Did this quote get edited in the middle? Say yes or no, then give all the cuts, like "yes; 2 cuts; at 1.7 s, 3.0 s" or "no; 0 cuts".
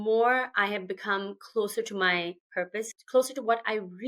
yes; 1 cut; at 2.9 s